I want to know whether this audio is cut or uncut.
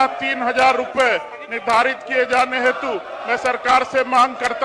uncut